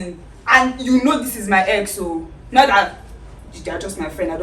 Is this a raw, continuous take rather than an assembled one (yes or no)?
yes